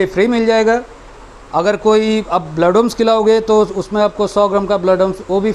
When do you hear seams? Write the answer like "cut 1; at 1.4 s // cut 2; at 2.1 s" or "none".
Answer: none